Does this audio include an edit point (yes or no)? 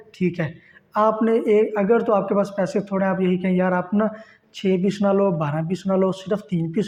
no